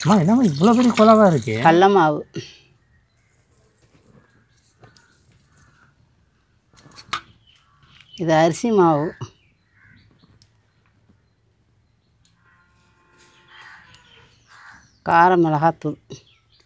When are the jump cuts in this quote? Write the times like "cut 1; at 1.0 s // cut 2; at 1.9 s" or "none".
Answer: cut 1; at 1.5 s